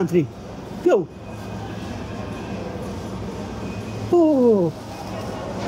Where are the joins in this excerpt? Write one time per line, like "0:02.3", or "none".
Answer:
none